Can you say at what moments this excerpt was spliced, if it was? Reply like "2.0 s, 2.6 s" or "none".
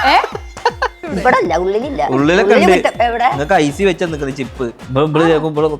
1.0 s, 4.8 s